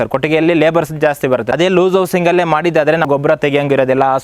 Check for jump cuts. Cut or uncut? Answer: cut